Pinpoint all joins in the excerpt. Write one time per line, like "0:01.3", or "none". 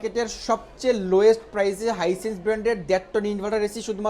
none